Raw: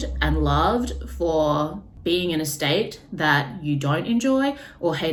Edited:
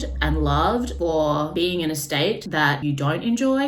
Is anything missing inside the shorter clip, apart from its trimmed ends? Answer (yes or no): yes